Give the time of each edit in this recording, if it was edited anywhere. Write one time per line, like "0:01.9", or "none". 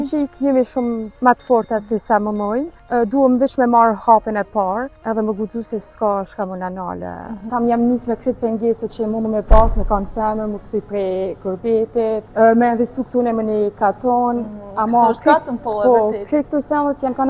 0:01.1
0:02.8
0:04.9
0:07.5
0:12.3